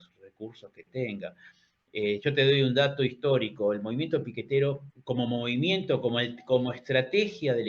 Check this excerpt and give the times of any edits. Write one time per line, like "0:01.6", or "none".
0:04.9